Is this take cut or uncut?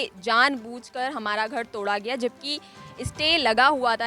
uncut